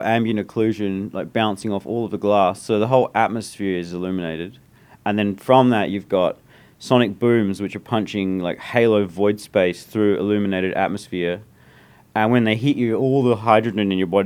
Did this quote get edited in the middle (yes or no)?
no